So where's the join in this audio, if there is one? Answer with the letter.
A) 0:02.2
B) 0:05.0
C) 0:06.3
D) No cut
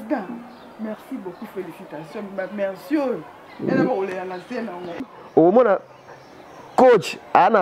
B